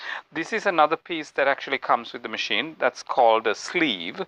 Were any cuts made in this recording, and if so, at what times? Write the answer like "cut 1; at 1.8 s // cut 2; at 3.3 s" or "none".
none